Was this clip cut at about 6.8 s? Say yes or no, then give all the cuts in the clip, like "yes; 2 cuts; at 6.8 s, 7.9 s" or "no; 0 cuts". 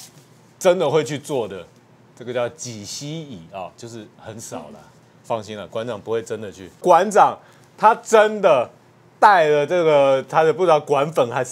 yes; 1 cut; at 6.8 s